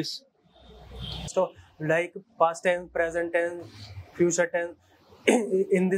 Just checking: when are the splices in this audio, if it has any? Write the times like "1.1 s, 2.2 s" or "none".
1.3 s